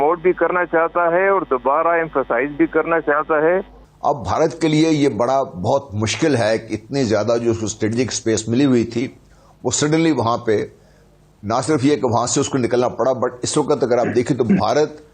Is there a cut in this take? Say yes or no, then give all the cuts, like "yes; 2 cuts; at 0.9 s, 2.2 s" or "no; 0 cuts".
yes; 1 cut; at 3.8 s